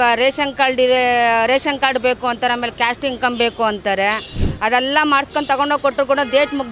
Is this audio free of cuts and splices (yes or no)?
yes